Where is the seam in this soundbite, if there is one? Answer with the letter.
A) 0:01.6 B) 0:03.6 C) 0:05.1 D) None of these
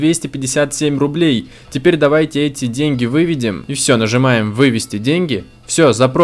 B